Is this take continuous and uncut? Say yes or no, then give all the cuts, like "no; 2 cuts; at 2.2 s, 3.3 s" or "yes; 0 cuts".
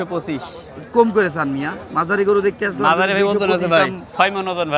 yes; 0 cuts